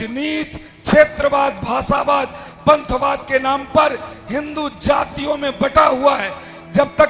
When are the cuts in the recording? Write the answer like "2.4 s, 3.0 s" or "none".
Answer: none